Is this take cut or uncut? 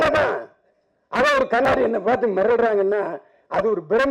cut